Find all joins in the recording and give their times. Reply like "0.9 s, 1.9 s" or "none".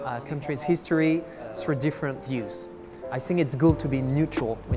3.1 s